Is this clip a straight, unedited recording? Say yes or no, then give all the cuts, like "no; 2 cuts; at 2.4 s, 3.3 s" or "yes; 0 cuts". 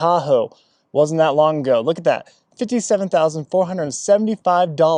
yes; 0 cuts